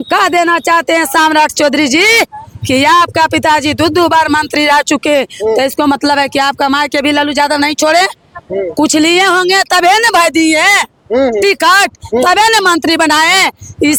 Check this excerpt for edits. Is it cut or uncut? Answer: uncut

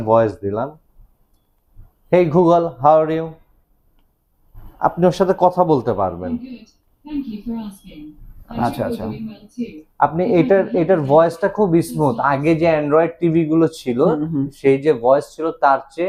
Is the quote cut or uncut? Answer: uncut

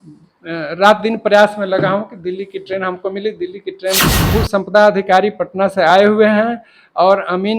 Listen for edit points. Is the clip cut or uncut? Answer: cut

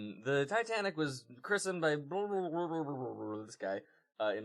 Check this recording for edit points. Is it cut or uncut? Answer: uncut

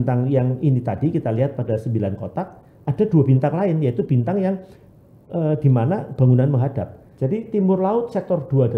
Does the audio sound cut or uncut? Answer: cut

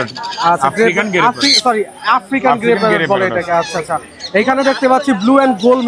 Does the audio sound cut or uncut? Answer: uncut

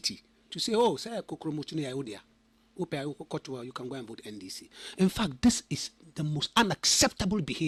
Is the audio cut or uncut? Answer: uncut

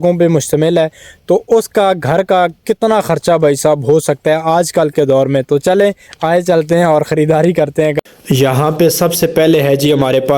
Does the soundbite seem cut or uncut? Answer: cut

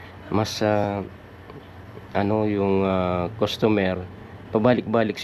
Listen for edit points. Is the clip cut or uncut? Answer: uncut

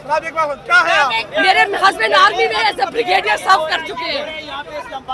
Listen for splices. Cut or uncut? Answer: uncut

